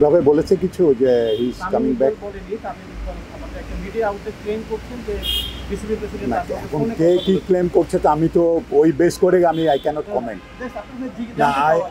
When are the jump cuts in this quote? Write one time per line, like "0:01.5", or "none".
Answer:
none